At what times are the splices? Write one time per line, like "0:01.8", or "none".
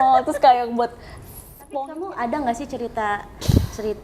0:01.7